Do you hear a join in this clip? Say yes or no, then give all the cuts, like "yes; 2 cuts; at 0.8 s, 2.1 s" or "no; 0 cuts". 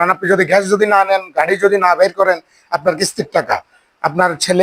no; 0 cuts